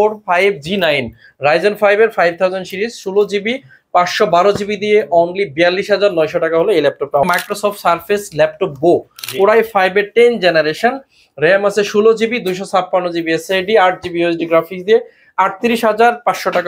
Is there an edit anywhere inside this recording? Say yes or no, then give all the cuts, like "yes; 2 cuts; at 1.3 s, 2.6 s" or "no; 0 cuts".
yes; 1 cut; at 7.2 s